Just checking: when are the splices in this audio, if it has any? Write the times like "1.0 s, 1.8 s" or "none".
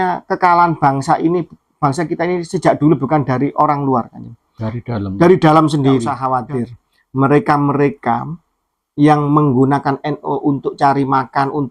6.2 s